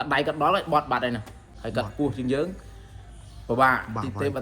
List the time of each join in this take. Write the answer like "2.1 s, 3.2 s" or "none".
1.4 s